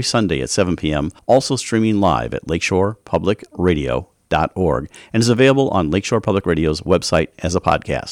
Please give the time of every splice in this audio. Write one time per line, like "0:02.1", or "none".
0:01.1